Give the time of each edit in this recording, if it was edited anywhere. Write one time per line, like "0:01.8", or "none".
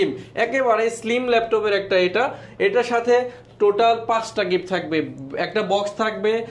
none